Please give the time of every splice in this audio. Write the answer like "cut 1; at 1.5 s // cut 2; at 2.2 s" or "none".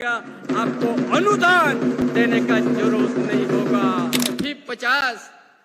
cut 1; at 4.4 s